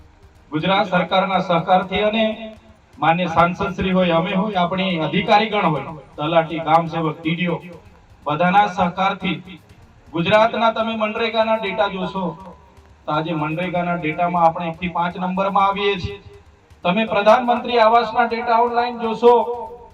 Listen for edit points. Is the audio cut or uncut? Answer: uncut